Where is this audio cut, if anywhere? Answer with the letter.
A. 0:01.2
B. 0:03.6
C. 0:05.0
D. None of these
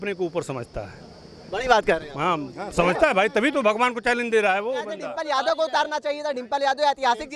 C